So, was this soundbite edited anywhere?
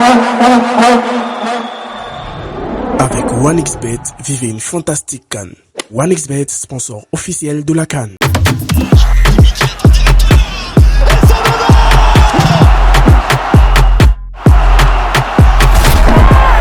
yes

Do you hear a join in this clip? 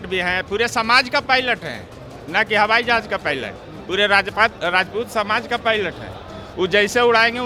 no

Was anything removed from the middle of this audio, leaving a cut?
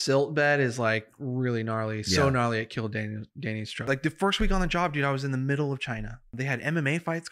yes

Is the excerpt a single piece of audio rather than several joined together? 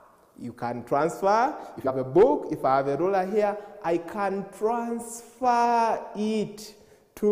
no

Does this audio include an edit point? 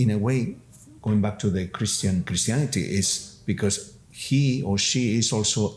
yes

